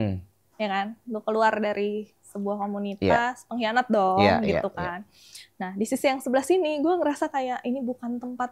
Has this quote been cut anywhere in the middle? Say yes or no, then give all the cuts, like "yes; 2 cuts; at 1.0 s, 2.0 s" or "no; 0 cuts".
no; 0 cuts